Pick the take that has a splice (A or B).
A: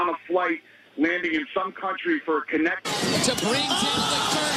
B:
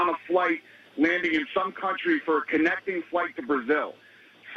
B